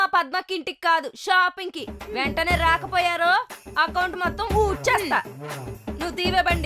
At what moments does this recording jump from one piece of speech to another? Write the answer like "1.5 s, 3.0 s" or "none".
none